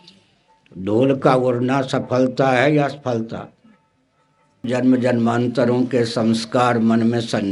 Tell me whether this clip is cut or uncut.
cut